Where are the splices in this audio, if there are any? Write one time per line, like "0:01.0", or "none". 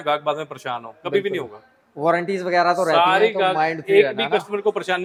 none